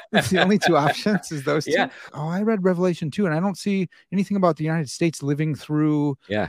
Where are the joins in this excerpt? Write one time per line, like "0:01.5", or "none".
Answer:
0:02.0